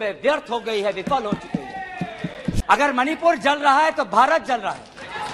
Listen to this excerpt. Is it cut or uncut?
cut